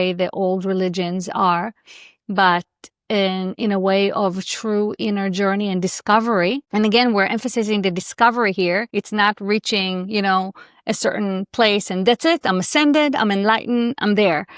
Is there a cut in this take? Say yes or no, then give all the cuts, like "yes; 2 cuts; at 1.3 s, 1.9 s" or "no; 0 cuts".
yes; 2 cuts; at 6.6 s, 8.9 s